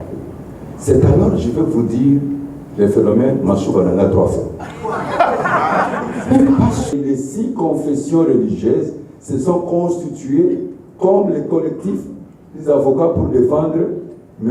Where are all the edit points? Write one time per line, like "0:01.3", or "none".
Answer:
0:06.9